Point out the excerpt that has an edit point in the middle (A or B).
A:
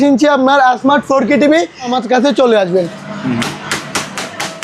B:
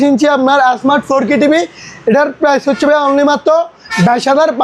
A